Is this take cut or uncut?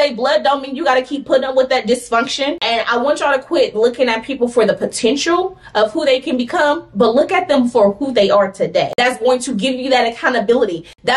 cut